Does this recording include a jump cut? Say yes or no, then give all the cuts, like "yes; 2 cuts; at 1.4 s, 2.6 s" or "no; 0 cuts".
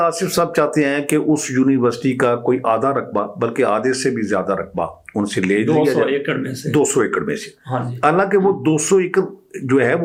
no; 0 cuts